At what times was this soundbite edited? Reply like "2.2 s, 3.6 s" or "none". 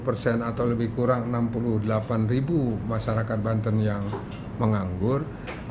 none